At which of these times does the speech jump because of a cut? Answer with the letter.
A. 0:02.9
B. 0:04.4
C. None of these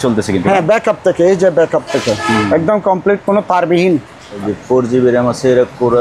B